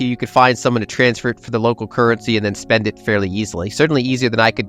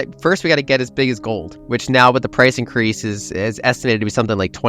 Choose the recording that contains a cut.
second; 1 cut; at 1.5 s

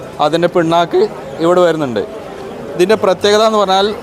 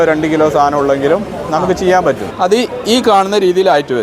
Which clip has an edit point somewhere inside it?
second; 1 cut; at 2.3 s

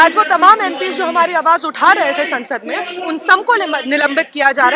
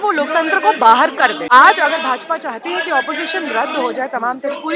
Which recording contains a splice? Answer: second; 1 cut; at 1.4 s

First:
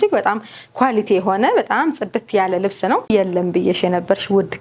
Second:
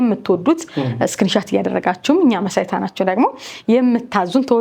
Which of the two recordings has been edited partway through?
first; 1 cut; at 3.1 s

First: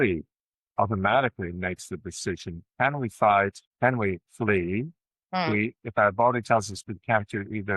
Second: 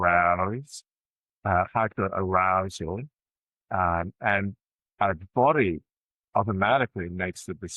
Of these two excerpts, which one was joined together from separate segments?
first; 1 cut; at 3.6 s

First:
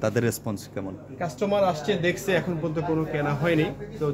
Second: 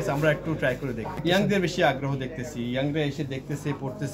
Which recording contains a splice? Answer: second; 1 cut; at 1.1 s

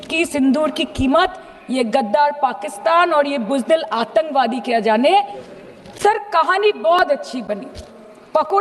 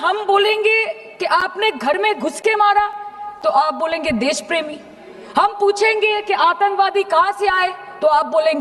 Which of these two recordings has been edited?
first; 1 cut; at 5.4 s

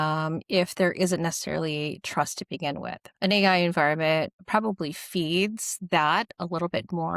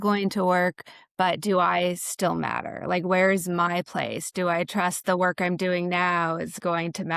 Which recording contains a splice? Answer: first; 2 cuts; at 3.0 s, 4.4 s

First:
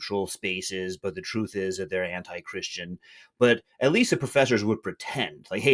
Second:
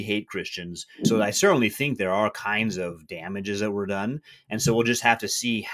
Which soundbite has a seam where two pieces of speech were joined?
second; 1 cut; at 0.9 s

